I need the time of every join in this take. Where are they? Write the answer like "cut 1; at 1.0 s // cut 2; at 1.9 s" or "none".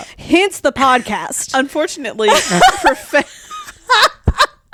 none